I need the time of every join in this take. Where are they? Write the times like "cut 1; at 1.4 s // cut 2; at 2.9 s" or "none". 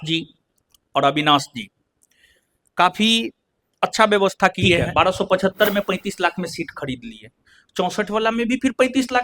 cut 1; at 4.9 s